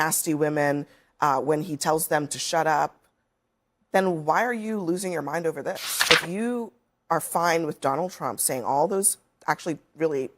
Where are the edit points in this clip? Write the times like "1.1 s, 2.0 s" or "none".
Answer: 5.9 s